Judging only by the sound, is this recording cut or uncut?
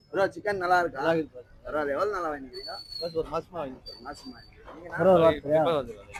uncut